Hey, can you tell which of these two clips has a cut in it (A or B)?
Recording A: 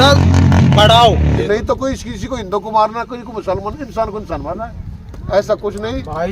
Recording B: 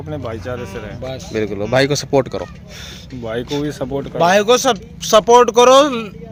A